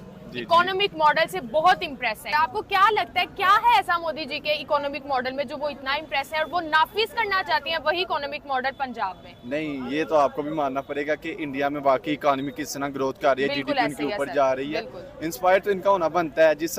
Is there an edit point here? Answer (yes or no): no